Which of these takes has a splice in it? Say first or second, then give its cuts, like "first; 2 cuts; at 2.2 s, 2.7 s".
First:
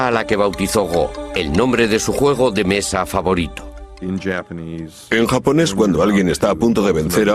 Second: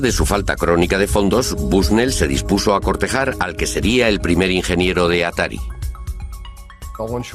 first; 1 cut; at 2.6 s